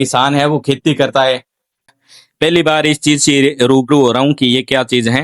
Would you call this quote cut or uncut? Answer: cut